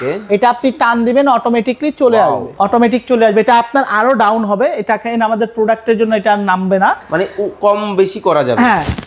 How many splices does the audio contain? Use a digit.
0